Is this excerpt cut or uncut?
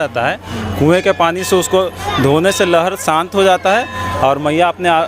uncut